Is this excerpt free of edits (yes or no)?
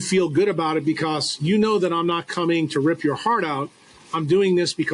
yes